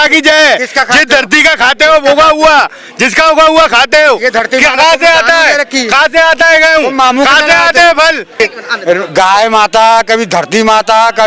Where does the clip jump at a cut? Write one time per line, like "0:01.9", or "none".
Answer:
0:08.4